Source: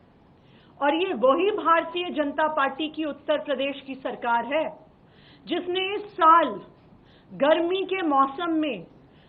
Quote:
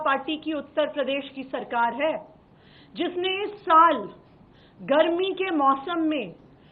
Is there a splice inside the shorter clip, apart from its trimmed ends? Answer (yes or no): no